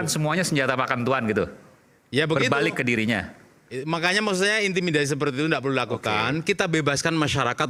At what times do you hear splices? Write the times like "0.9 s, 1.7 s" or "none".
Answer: none